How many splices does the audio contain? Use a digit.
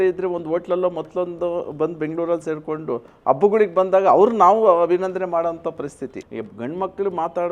1